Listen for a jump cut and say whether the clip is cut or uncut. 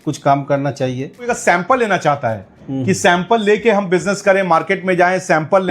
cut